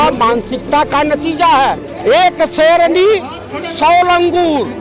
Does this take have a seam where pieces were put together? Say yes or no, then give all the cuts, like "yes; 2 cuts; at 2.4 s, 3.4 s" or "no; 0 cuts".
yes; 1 cut; at 1.9 s